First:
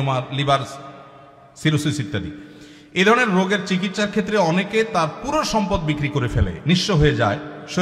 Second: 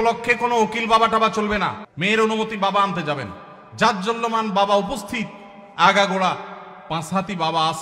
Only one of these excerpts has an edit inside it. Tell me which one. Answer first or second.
second